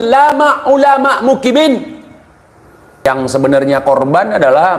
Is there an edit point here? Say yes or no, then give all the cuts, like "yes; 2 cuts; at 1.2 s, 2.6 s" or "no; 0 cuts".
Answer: yes; 1 cut; at 3.1 s